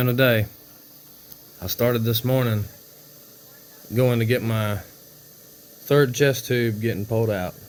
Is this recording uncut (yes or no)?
yes